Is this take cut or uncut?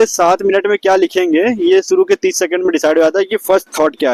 uncut